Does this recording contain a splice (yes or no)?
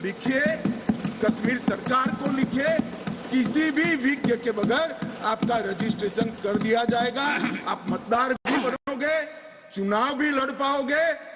no